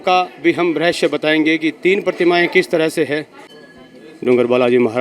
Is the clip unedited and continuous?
yes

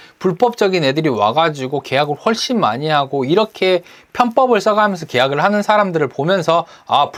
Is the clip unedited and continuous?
yes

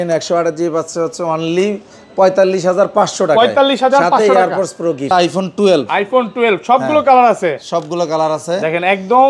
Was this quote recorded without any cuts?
no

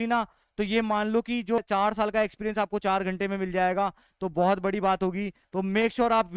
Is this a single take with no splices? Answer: no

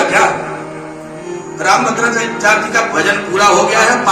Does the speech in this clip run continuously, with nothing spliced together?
no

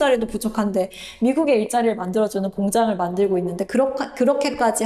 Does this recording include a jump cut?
no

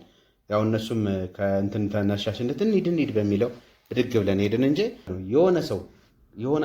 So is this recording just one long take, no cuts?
no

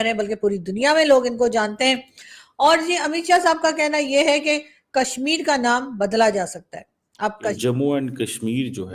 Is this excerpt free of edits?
no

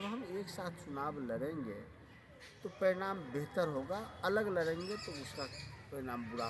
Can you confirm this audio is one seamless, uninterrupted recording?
yes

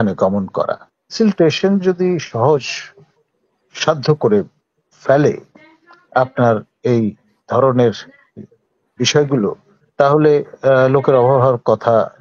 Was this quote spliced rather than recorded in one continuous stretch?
yes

